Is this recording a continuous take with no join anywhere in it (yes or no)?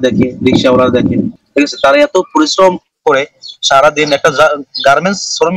no